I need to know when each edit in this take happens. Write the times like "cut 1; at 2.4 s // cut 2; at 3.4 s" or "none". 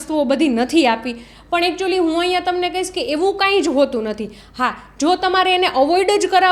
none